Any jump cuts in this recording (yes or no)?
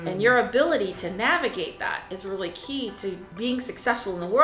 yes